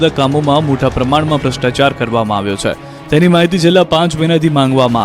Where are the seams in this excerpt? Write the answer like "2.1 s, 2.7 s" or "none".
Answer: 2.5 s